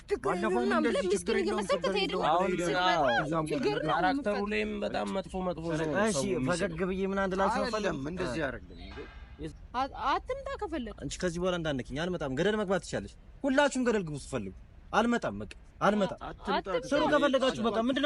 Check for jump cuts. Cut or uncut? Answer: cut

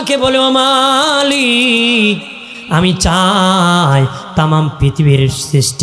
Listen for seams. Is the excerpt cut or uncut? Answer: cut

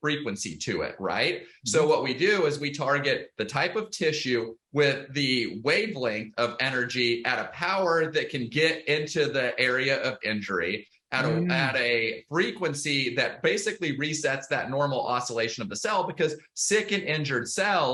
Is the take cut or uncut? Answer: uncut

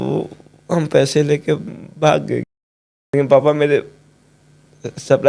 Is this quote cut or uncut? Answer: cut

